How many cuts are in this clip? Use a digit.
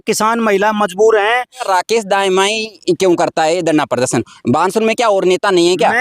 1